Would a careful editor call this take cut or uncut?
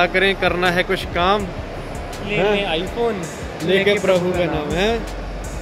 uncut